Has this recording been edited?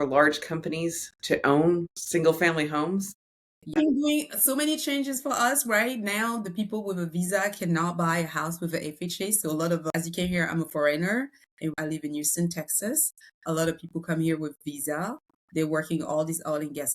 yes; 4 cuts; at 2.0 s, 3.7 s, 9.8 s, 11.7 s

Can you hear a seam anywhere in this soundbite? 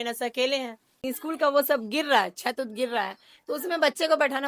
yes; 1 cut; at 0.9 s

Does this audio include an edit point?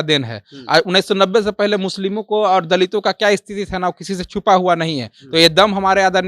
no; 0 cuts

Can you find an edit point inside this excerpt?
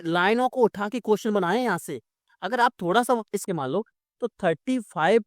yes; 1 cut; at 3.5 s

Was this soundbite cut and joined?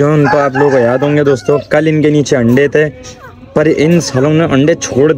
no; 0 cuts

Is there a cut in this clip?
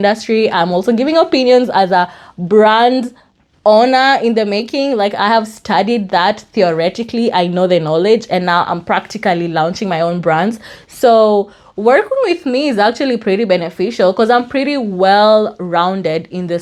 no; 0 cuts

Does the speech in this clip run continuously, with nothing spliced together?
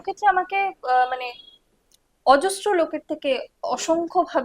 yes; 0 cuts

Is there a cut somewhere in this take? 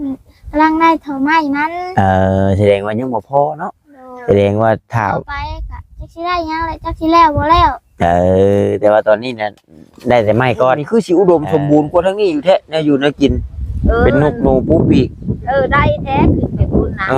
yes; 1 cut; at 10.8 s

